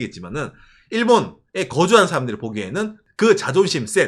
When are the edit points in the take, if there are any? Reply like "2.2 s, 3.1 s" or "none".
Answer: 3.0 s